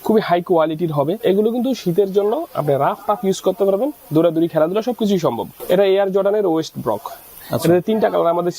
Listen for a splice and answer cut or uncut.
cut